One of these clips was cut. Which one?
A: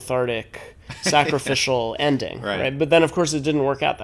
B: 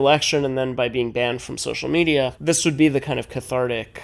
B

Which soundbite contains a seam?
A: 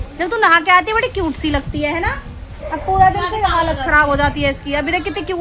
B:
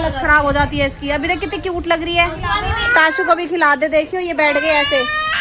B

